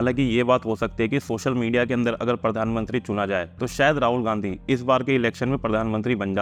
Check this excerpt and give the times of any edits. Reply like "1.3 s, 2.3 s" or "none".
none